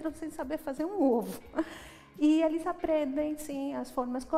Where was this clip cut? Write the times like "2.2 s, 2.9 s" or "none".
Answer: none